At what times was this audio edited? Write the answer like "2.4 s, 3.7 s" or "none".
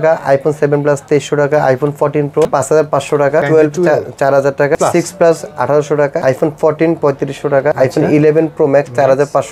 2.4 s, 3.4 s, 4.8 s, 6.2 s, 7.7 s